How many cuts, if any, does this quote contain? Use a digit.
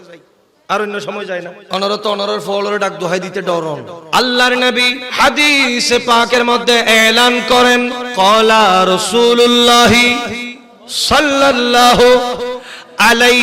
4